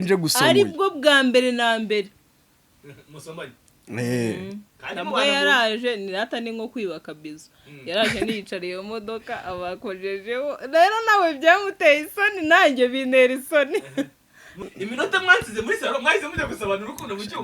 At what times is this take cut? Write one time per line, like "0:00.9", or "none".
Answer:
0:14.6